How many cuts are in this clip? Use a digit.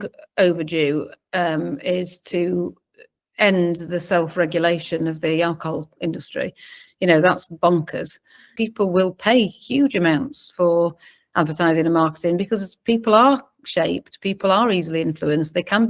1